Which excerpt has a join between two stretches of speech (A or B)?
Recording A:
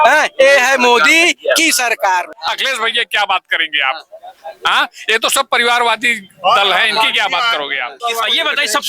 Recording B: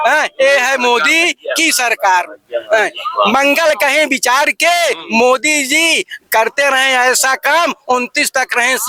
A